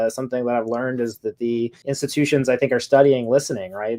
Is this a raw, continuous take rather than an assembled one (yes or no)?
no